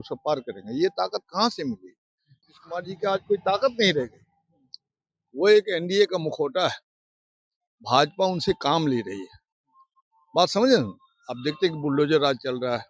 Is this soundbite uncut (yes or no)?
no